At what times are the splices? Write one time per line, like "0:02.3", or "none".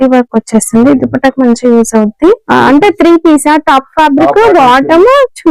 0:02.4